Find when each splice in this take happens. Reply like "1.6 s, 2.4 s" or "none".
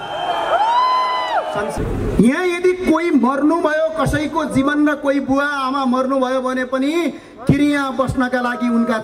1.7 s